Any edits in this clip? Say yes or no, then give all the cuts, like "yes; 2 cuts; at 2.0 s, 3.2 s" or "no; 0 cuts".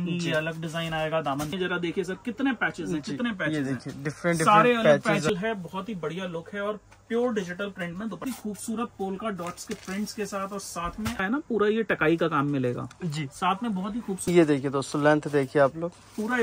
yes; 5 cuts; at 1.5 s, 5.3 s, 8.2 s, 11.2 s, 14.3 s